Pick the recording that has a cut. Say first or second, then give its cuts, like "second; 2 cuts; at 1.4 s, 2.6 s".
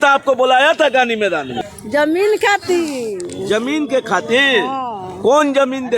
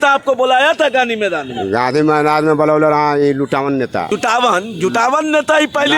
first; 1 cut; at 1.6 s